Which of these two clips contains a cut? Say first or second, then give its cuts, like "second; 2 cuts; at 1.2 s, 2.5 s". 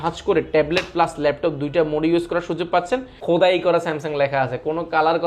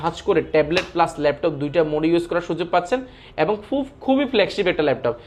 first; 1 cut; at 3.1 s